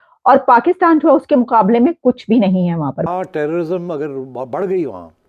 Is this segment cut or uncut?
cut